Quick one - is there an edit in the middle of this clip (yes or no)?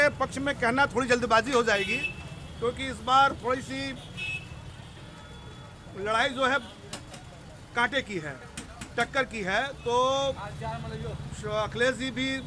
no